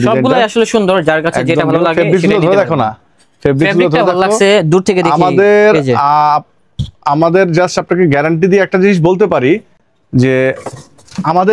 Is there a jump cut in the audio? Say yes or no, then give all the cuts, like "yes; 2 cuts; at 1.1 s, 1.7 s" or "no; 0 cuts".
no; 0 cuts